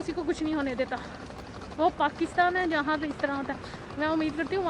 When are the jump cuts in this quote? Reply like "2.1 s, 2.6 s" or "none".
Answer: none